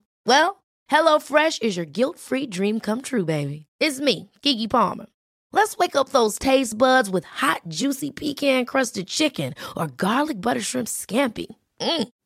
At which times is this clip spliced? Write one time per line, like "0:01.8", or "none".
none